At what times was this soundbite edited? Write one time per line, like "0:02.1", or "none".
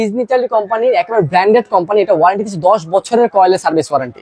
none